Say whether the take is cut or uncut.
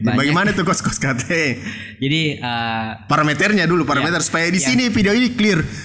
uncut